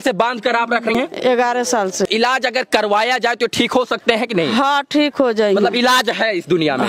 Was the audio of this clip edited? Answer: yes; 2 cuts; at 0.9 s, 2.1 s

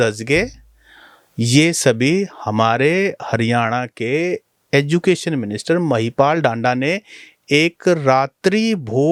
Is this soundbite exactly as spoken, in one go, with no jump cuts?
yes; 0 cuts

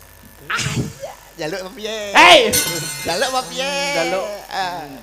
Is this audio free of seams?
yes; 0 cuts

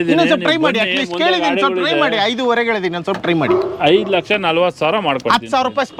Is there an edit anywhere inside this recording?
no; 0 cuts

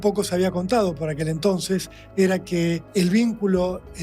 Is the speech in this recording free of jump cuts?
no; 1 cut; at 2.8 s

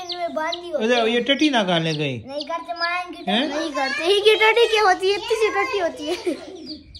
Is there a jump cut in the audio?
no; 0 cuts

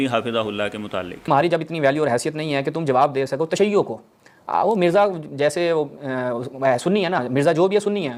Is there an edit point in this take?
no; 0 cuts

